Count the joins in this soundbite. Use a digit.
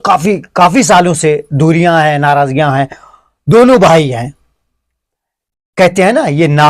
0